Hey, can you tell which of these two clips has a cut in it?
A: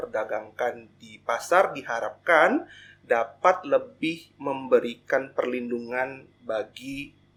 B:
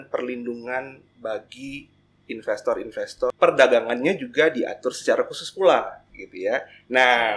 B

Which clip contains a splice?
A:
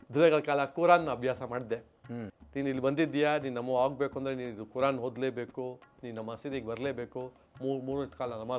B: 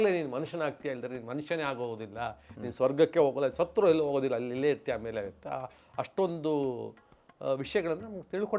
A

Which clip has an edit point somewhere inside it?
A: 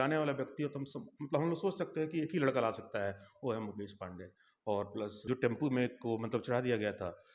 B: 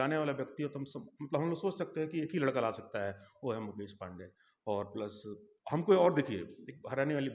A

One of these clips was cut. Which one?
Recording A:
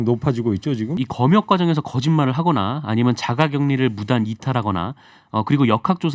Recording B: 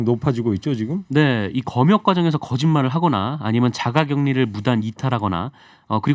A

